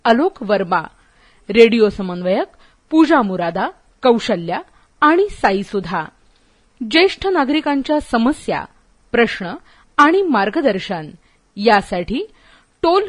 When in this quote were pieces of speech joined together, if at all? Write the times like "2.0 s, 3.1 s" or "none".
none